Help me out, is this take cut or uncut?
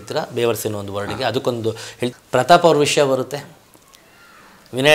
cut